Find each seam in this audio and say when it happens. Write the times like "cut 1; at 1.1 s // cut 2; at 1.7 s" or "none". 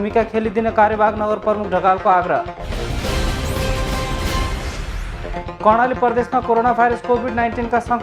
none